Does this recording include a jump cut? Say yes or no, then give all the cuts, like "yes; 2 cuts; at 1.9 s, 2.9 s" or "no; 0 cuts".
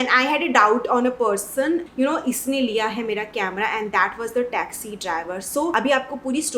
no; 0 cuts